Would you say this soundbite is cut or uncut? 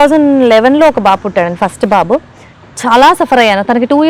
uncut